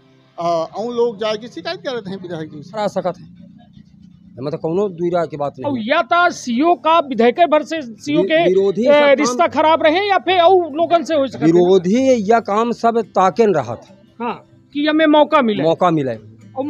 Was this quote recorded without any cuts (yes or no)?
no